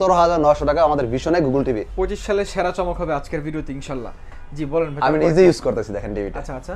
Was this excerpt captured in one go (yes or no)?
yes